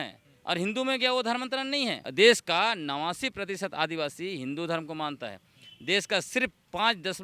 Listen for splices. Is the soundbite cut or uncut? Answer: cut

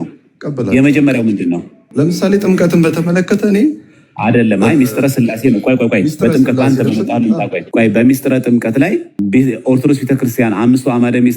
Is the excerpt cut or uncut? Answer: cut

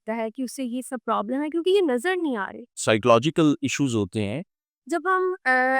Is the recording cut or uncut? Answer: cut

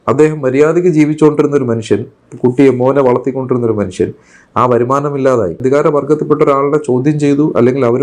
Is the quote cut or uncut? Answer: cut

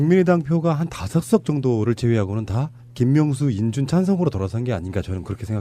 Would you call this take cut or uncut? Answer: cut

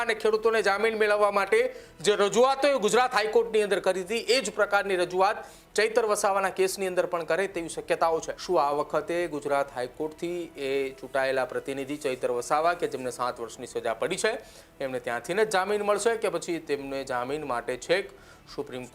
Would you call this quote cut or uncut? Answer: cut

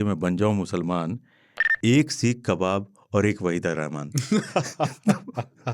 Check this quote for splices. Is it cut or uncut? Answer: uncut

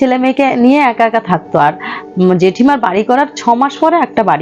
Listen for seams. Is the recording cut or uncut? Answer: uncut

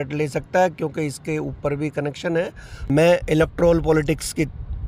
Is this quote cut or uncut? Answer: cut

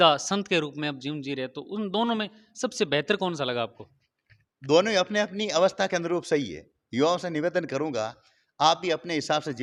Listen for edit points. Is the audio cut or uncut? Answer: uncut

